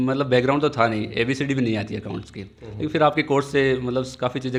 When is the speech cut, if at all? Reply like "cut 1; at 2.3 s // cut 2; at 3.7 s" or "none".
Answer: none